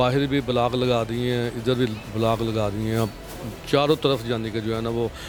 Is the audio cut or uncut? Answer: uncut